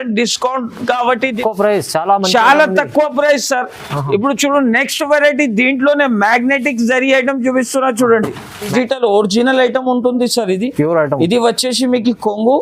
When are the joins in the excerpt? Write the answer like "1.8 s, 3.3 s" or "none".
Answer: 1.4 s, 8.7 s